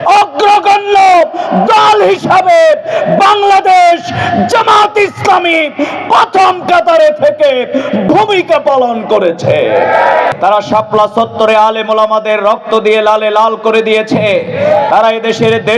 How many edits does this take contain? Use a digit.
1